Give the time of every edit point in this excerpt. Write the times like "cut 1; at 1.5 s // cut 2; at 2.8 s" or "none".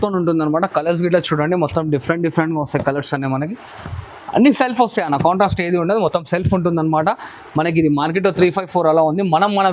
none